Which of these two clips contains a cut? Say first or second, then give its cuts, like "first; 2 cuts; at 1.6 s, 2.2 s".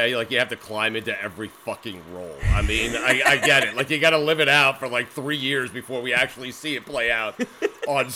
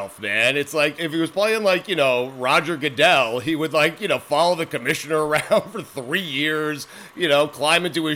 second; 1 cut; at 1.0 s